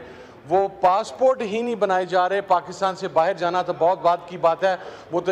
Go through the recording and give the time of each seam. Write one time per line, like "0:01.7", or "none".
none